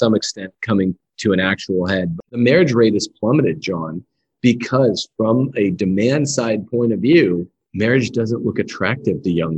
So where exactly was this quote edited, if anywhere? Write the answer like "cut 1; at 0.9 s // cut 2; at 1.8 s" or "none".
cut 1; at 2.2 s